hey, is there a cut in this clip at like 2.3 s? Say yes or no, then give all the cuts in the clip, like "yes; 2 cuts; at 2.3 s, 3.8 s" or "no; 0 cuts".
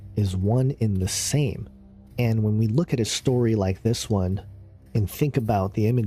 no; 1 cut; at 4.3 s